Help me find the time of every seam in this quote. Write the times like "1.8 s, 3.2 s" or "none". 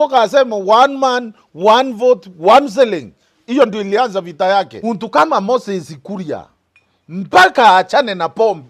4.7 s

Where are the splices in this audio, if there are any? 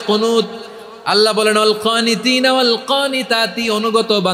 none

